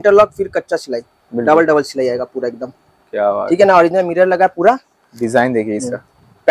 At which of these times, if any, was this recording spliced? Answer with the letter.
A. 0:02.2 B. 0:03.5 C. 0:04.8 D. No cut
D